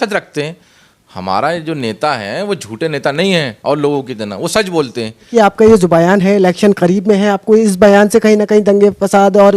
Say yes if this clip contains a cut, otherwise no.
yes